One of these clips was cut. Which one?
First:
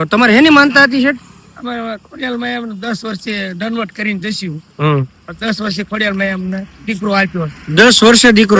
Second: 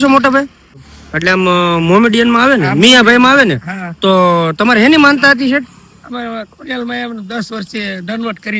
second; 1 cut; at 0.9 s

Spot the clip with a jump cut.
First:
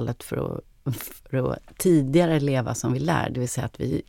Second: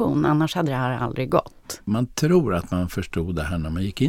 second; 1 cut; at 1.8 s

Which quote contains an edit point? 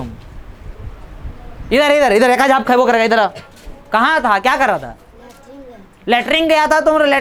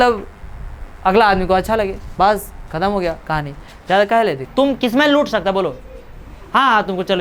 second; 1 cut; at 4.4 s

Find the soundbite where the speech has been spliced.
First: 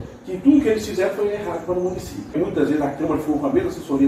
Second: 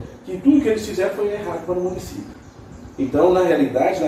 first; 1 cut; at 2.4 s

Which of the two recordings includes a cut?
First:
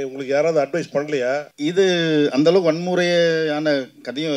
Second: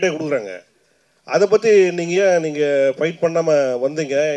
first; 1 cut; at 1.5 s

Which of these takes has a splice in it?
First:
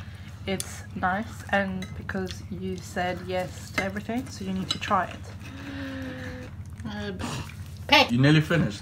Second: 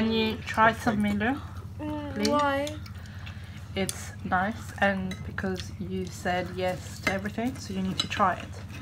first; 2 cuts; at 6.5 s, 8.1 s

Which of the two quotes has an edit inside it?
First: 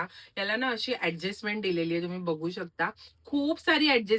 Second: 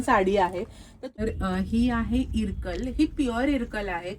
second; 1 cut; at 1.0 s

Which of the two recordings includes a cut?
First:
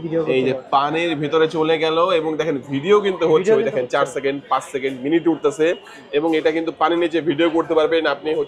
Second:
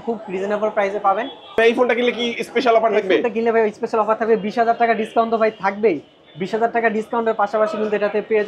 second; 1 cut; at 1.6 s

